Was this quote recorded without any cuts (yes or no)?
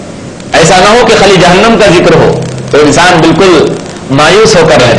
yes